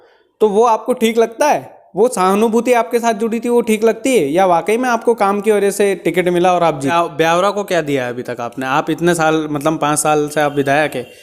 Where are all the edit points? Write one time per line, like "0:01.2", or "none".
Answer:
0:06.9